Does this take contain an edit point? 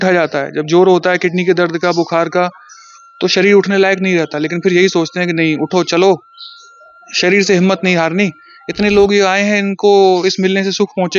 no; 0 cuts

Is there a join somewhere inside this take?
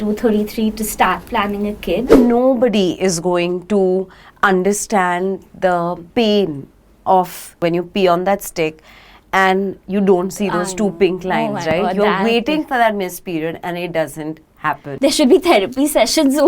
yes; 4 cuts; at 2.1 s, 6.0 s, 7.6 s, 14.9 s

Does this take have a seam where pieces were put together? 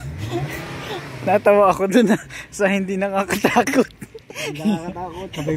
no; 0 cuts

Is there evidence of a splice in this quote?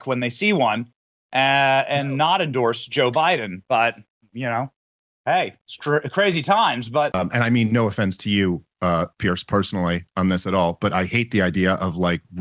yes; 1 cut; at 7.1 s

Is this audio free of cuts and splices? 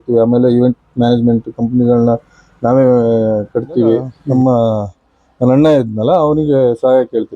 no; 1 cut; at 4.2 s

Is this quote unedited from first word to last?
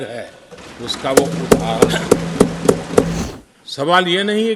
no; 1 cut; at 3.1 s

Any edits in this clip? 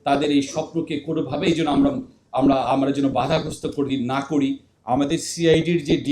no; 0 cuts

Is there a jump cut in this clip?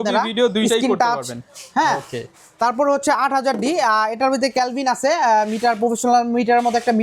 no; 0 cuts

